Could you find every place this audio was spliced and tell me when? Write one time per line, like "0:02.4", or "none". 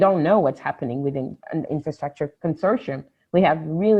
0:01.8